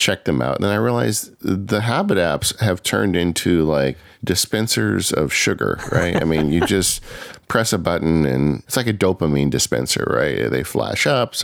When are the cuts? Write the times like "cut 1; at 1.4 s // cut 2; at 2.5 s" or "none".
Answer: cut 1; at 4.1 s // cut 2; at 8.7 s